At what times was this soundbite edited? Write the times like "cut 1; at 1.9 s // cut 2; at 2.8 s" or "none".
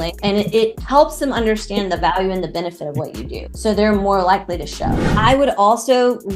cut 1; at 5.1 s